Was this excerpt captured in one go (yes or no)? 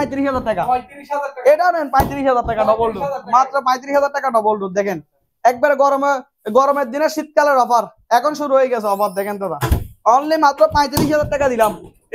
yes